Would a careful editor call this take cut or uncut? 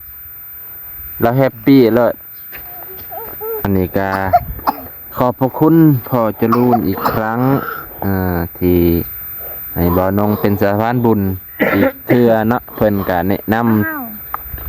cut